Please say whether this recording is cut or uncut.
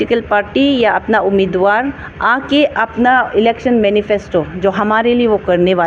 uncut